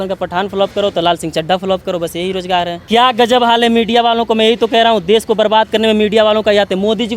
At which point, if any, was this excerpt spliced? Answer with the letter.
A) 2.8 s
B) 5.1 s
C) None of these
A